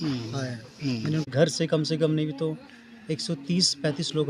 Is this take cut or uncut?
cut